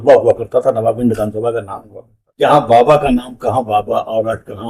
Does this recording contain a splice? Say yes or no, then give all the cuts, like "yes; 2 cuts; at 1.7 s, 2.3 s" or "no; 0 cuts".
yes; 1 cut; at 2.2 s